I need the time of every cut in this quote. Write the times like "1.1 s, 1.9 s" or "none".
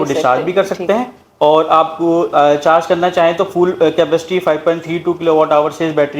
none